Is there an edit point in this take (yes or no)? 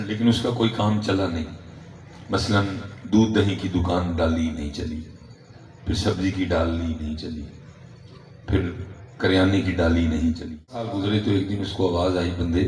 yes